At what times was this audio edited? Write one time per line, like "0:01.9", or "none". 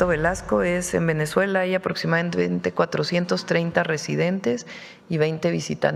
none